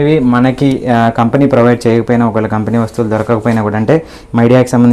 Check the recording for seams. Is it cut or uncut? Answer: uncut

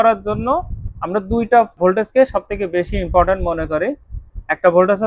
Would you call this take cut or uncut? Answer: cut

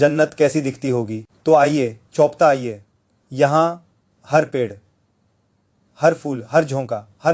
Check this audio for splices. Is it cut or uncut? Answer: uncut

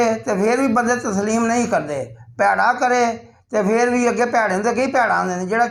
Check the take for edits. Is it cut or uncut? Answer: uncut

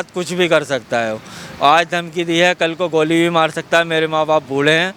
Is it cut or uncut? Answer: uncut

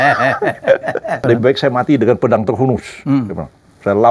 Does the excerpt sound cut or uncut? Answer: cut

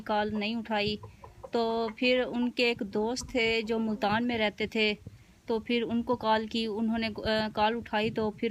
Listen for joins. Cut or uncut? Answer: uncut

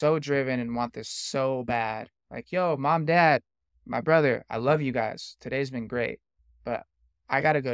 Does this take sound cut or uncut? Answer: uncut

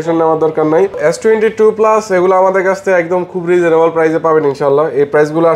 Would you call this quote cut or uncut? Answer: uncut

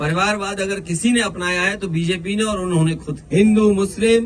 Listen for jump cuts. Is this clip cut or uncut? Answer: cut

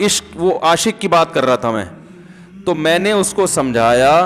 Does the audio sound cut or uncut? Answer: uncut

